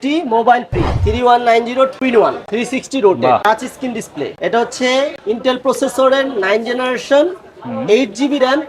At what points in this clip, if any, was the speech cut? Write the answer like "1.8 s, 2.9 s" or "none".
1.0 s